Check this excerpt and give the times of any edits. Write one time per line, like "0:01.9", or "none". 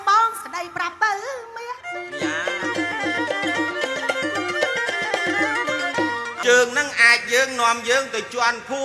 0:06.3